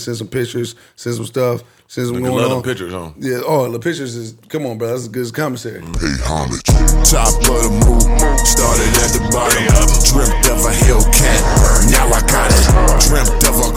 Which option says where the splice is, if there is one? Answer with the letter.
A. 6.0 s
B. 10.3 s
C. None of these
A